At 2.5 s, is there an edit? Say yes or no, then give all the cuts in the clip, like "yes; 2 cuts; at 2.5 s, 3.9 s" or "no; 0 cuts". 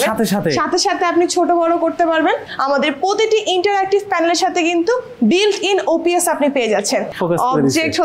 yes; 2 cuts; at 2.5 s, 7.1 s